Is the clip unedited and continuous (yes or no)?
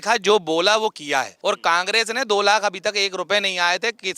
no